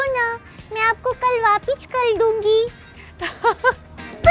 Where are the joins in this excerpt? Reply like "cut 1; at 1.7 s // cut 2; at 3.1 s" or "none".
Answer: none